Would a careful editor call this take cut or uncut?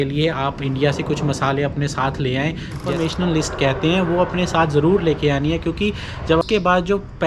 cut